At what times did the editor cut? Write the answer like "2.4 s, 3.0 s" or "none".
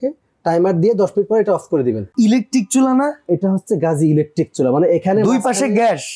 2.0 s

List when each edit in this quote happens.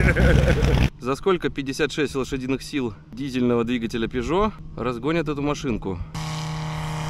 0.9 s, 3.1 s, 4.7 s, 6.1 s

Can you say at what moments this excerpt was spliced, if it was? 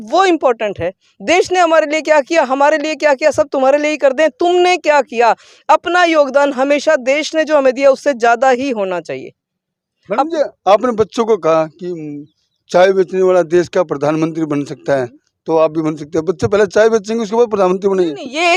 none

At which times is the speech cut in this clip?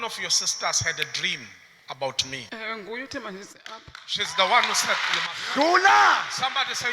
2.4 s

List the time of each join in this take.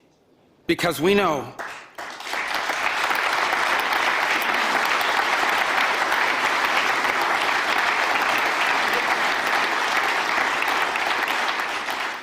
none

